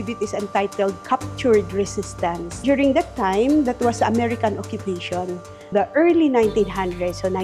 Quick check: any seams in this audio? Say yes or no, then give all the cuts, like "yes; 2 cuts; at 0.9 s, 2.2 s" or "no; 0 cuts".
yes; 2 cuts; at 2.5 s, 5.7 s